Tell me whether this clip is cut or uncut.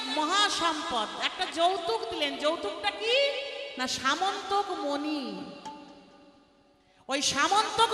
uncut